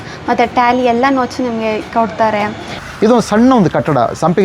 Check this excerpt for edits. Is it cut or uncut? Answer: cut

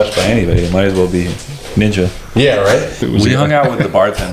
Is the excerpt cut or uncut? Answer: cut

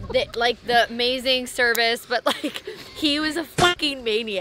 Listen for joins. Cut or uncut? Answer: uncut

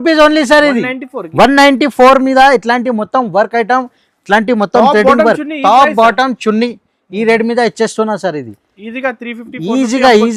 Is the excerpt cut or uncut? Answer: uncut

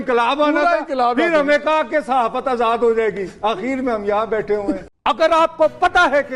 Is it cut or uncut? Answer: cut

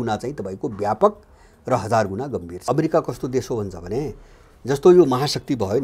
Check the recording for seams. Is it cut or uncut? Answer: cut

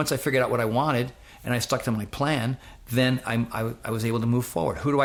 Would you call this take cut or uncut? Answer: uncut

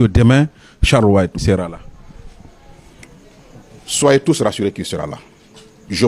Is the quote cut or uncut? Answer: cut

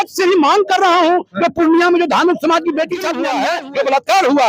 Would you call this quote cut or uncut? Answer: cut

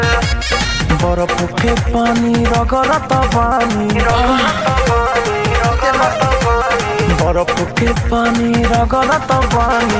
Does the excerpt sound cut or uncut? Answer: uncut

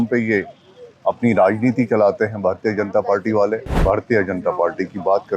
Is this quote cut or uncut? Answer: cut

